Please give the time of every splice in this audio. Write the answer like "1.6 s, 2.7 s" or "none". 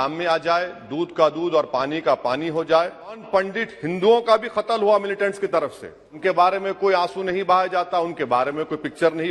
3.2 s, 6.1 s